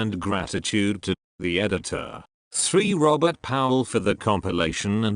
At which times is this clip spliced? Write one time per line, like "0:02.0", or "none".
0:00.9